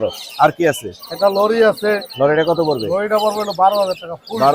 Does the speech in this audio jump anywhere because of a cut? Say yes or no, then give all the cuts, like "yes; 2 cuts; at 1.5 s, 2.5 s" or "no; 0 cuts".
no; 0 cuts